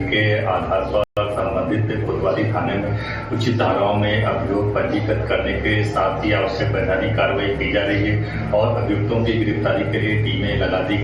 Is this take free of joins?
yes; 0 cuts

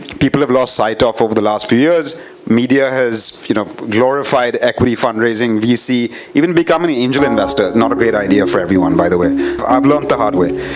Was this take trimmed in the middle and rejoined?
yes; 1 cut; at 9.6 s

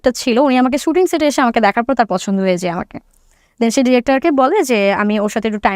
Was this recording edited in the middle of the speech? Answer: no; 0 cuts

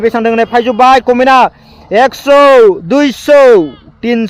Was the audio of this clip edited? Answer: no; 0 cuts

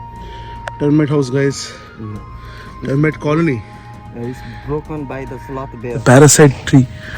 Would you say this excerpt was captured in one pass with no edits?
no; 1 cut; at 6.0 s

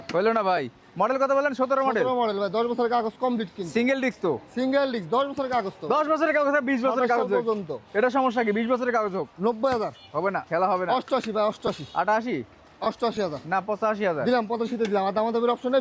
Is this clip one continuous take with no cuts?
yes; 0 cuts

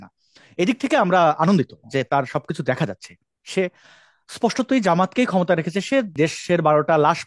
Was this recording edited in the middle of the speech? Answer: yes; 1 cut; at 6.1 s

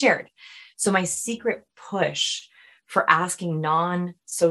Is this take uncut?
yes; 0 cuts

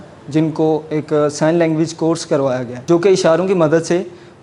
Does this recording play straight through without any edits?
no; 1 cut; at 2.7 s

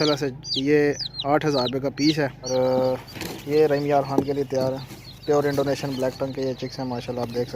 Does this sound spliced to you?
yes; 1 cut; at 2.5 s

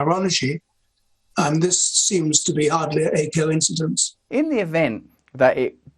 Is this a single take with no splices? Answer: no; 1 cut; at 4.1 s

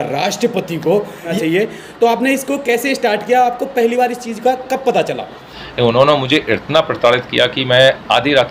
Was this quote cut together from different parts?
yes; 2 cuts; at 1.3 s, 5.6 s

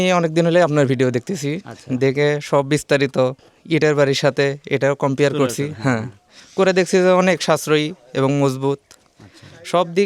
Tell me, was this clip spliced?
no; 0 cuts

